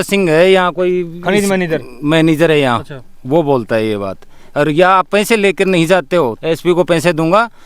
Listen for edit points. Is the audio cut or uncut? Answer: cut